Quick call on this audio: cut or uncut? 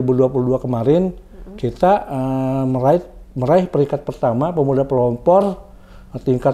uncut